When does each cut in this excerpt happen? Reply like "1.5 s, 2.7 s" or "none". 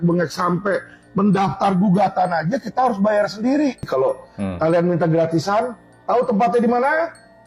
3.8 s